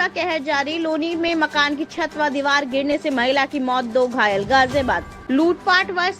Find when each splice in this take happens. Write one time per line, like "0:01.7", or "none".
0:05.1